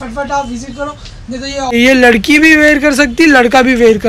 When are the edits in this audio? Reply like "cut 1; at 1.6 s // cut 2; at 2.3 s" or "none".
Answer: cut 1; at 1.7 s